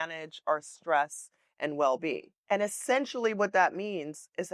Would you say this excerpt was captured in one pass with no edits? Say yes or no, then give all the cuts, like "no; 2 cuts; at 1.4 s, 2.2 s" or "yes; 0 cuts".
no; 1 cut; at 2.3 s